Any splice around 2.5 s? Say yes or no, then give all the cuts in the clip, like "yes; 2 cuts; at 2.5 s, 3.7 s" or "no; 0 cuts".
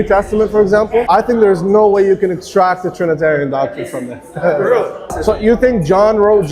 no; 2 cuts; at 1.1 s, 5.0 s